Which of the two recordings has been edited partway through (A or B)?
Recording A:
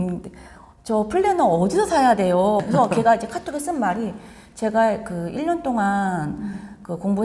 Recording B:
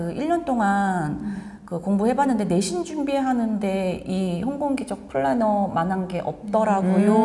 A